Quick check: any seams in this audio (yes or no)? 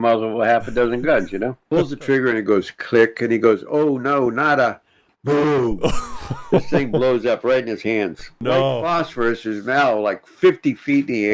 yes